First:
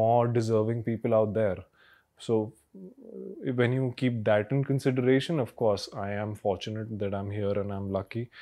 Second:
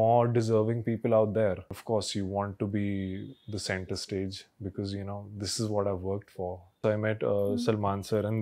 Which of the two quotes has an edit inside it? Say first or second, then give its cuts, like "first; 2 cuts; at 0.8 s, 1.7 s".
second; 2 cuts; at 1.8 s, 6.8 s